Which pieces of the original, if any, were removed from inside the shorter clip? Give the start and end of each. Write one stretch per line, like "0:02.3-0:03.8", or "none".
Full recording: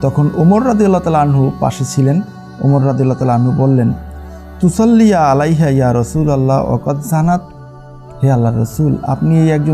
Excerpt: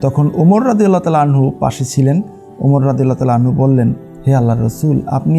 0:04.1-0:08.1